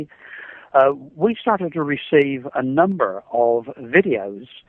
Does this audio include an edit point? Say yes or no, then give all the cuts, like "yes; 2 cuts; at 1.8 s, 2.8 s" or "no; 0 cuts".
yes; 1 cut; at 2.4 s